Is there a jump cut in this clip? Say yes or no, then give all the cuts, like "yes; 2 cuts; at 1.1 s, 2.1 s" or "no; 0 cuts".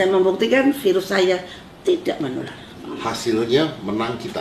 yes; 1 cut; at 2.8 s